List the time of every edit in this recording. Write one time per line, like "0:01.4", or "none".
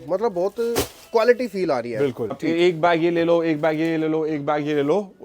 0:02.4